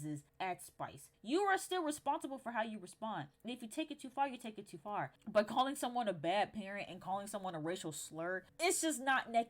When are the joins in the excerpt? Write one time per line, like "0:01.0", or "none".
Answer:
0:01.1
0:05.1